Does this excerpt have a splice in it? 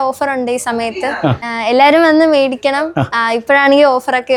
no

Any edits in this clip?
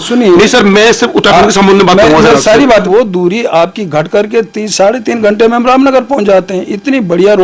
yes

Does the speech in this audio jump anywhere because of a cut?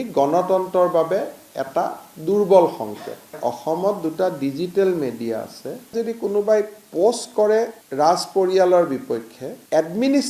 yes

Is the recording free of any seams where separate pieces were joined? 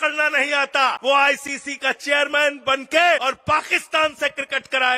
no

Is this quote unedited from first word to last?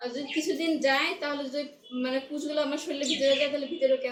yes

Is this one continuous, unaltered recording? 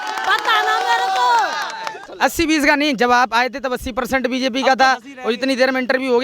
no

